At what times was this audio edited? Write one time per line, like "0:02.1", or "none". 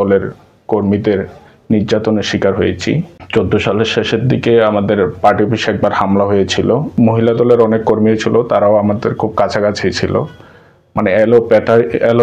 0:03.2
0:06.9